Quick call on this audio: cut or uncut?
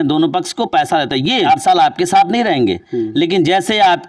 cut